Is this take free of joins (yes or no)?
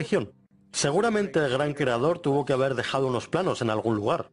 no